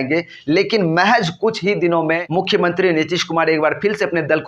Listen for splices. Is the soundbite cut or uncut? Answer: cut